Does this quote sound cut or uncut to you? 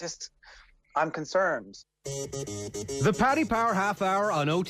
cut